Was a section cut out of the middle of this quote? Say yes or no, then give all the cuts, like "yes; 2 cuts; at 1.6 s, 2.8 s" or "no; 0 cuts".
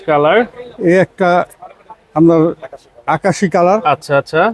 no; 0 cuts